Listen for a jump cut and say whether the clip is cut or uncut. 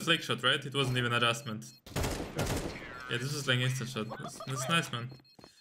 uncut